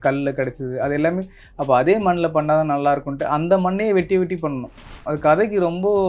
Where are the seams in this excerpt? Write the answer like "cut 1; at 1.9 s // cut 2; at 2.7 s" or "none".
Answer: cut 1; at 4.9 s